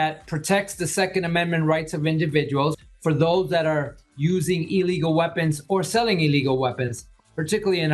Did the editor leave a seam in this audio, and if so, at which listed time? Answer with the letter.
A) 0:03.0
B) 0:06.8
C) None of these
C